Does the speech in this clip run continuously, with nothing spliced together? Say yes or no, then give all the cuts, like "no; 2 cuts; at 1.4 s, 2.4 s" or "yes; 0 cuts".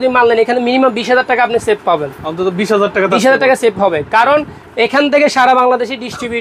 yes; 0 cuts